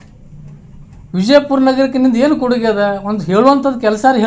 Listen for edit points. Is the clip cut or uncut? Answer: uncut